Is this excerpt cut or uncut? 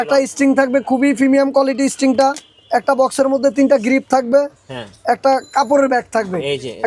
uncut